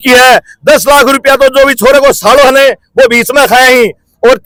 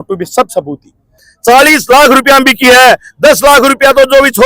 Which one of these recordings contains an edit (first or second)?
second